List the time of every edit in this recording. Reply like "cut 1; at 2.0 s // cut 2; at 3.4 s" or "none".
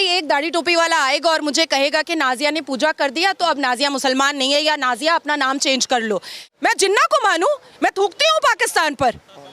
cut 1; at 6.5 s